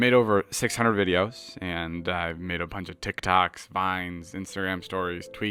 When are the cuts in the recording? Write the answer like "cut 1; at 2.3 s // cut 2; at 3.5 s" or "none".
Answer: none